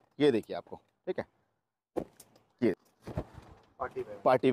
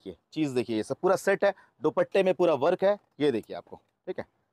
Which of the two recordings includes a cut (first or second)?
first